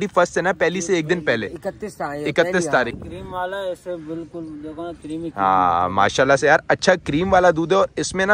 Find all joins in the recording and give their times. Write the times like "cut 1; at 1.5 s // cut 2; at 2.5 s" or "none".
cut 1; at 3.0 s